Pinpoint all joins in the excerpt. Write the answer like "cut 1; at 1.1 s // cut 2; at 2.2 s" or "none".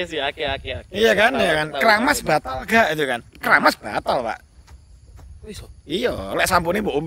none